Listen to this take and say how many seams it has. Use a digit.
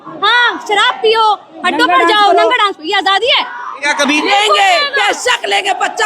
1